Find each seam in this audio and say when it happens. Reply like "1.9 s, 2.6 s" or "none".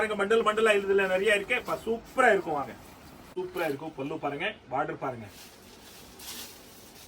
2.9 s

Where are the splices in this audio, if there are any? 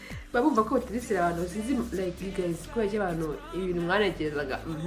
3.5 s

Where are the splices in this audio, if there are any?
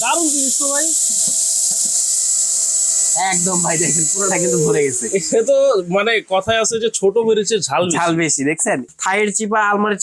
8.8 s

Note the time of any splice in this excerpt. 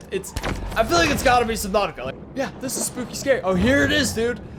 2.1 s

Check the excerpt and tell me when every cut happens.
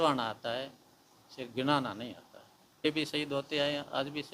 2.8 s

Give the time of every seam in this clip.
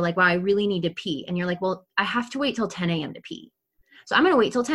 none

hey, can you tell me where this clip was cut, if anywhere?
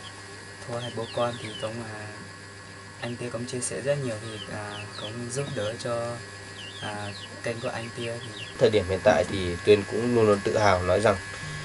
8.5 s

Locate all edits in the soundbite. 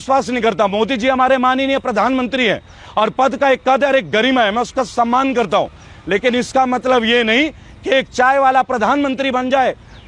none

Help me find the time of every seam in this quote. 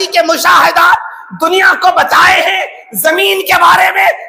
none

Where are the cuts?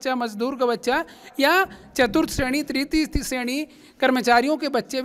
none

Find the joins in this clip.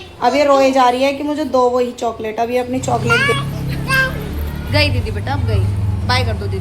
3.3 s

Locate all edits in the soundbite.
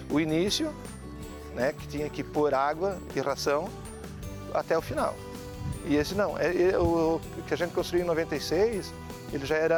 none

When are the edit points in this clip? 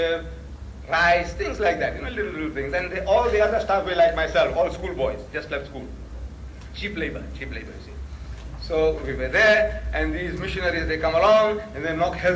none

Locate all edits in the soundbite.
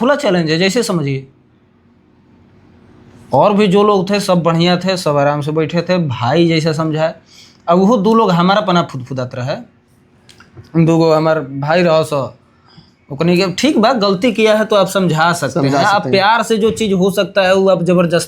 none

